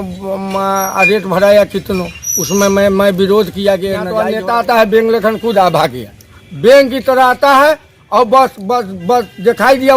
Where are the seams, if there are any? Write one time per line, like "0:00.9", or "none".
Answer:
0:04.1